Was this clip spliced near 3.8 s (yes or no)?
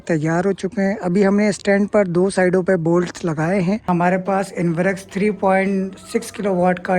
yes